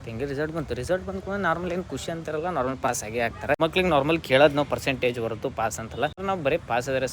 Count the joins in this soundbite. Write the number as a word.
two